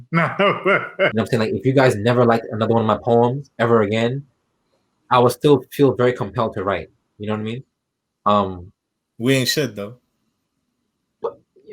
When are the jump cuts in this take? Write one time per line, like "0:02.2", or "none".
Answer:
0:01.1